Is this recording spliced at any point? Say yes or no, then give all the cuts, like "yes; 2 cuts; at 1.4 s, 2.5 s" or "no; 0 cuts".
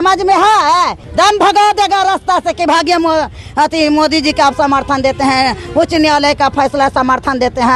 yes; 1 cut; at 1.0 s